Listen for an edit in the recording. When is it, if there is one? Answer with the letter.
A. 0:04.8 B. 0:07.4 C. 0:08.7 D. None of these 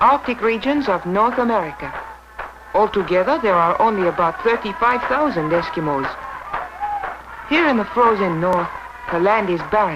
A